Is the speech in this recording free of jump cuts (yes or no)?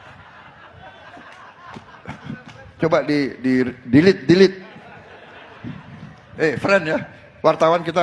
yes